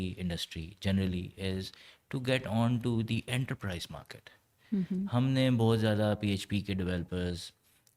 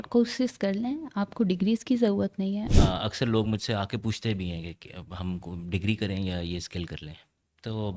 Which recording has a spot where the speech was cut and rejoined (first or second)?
second